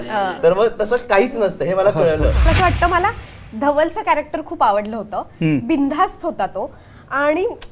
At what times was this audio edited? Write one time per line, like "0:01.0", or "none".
0:02.5